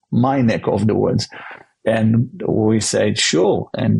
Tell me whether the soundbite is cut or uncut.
uncut